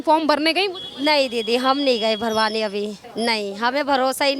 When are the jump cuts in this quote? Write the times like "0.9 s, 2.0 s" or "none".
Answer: 3.0 s